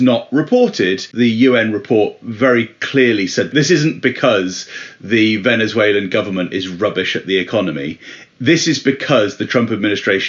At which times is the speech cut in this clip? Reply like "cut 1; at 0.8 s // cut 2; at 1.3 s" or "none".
cut 1; at 1.0 s // cut 2; at 3.5 s